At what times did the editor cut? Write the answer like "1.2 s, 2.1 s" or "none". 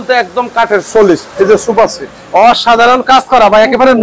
1.3 s